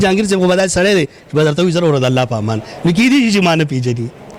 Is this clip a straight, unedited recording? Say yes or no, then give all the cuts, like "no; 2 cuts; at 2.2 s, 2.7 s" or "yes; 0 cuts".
yes; 0 cuts